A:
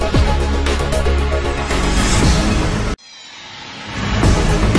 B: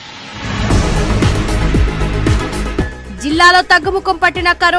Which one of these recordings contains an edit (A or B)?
B